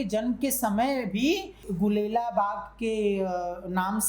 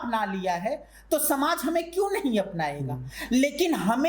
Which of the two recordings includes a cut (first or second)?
first